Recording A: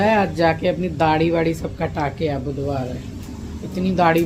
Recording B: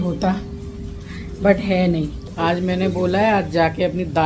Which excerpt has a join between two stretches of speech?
B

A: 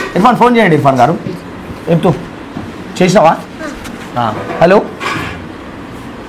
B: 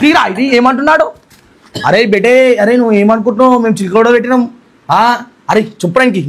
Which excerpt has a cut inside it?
A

